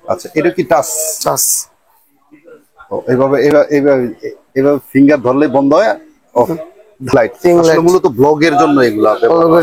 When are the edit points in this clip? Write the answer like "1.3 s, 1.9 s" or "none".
7.1 s